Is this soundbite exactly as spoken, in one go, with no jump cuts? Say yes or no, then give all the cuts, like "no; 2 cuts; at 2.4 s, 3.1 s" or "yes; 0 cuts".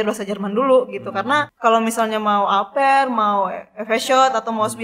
no; 1 cut; at 1.5 s